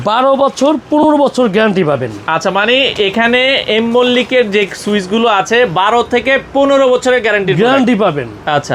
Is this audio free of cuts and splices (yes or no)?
yes